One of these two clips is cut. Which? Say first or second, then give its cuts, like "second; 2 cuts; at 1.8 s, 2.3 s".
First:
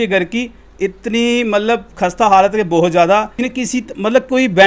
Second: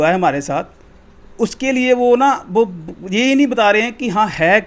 first; 1 cut; at 3.4 s